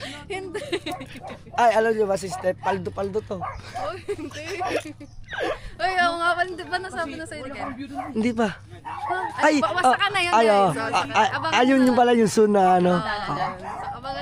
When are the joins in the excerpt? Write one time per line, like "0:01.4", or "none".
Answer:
none